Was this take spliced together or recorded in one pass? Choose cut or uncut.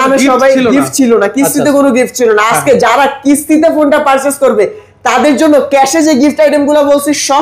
uncut